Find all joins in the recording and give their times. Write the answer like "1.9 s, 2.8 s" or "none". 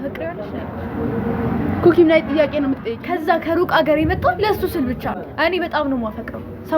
2.9 s, 5.2 s